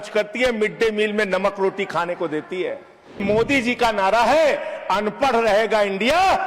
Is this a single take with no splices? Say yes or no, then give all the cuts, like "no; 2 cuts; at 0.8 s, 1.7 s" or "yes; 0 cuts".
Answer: no; 1 cut; at 3.2 s